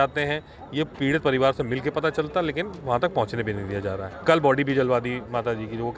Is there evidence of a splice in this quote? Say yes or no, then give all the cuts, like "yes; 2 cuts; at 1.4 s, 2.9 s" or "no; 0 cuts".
yes; 1 cut; at 4.1 s